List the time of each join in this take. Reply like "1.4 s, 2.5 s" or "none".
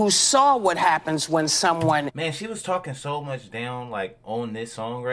2.1 s